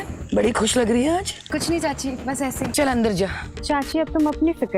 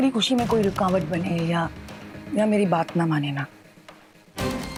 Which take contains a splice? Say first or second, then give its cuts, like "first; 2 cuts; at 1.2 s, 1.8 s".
first; 3 cuts; at 1.4 s, 2.7 s, 3.5 s